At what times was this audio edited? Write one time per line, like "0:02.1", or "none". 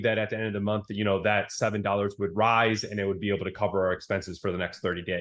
none